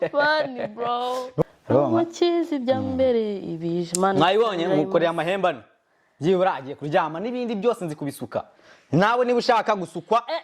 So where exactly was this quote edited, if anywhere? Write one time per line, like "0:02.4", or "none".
0:01.3